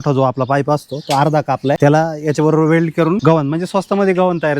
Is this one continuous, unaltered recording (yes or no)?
no